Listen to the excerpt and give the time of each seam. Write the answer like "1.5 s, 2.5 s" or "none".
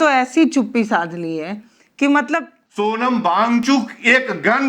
2.6 s